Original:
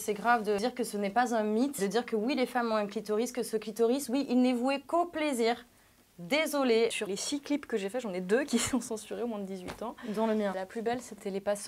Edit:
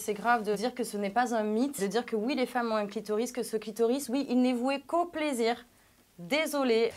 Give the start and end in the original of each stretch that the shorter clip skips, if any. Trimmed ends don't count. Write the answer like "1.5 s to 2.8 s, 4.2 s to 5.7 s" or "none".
none